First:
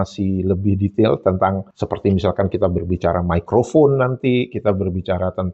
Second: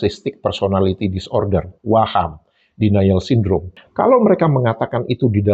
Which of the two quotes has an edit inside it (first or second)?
second